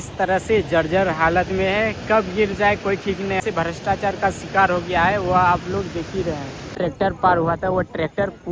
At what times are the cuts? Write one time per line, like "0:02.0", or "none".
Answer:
0:03.4
0:06.7